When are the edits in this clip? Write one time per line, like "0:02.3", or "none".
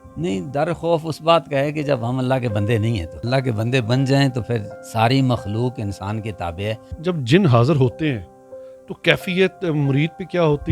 0:03.1
0:04.8
0:06.9